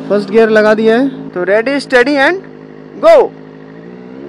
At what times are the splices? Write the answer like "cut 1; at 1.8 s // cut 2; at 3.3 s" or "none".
cut 1; at 1.2 s